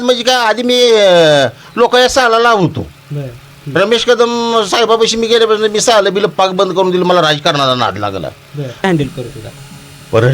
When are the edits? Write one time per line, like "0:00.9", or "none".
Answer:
0:08.8